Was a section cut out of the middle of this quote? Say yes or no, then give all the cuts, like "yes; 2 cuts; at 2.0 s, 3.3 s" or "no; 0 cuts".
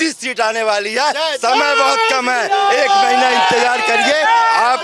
no; 0 cuts